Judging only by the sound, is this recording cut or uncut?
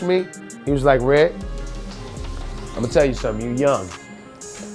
uncut